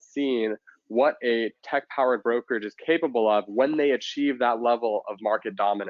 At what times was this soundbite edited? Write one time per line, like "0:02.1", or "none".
none